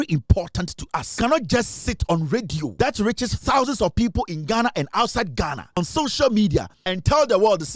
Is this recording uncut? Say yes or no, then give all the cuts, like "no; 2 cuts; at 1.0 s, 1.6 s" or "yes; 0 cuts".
no; 4 cuts; at 1.2 s, 2.7 s, 5.8 s, 6.8 s